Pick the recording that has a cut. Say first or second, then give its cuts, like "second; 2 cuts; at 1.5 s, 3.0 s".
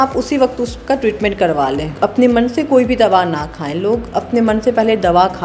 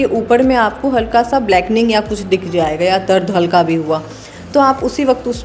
first; 1 cut; at 1.8 s